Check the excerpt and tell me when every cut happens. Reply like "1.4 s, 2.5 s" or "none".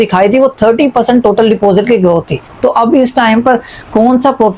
2.4 s